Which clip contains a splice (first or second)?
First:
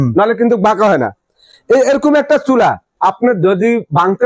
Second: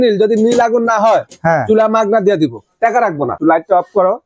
second